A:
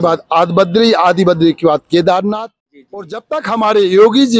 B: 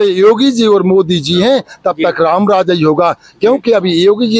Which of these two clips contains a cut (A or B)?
A